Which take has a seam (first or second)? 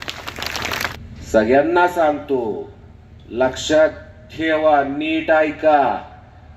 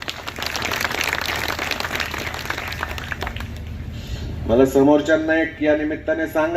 first